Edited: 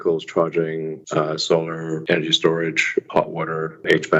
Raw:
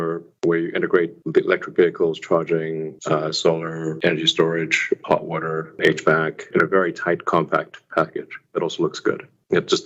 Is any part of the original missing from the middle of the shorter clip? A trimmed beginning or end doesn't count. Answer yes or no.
no